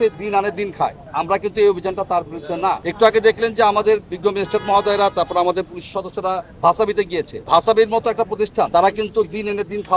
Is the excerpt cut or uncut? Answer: cut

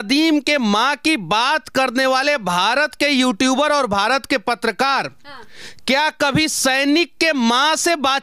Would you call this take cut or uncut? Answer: uncut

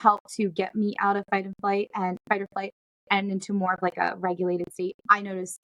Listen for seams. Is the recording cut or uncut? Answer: uncut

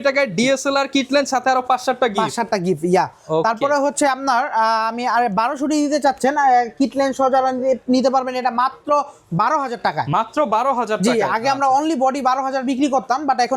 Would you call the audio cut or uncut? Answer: uncut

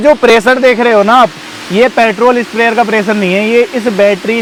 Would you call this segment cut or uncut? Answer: uncut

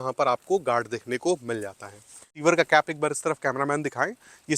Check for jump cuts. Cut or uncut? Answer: cut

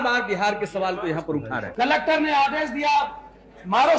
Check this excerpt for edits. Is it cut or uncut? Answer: cut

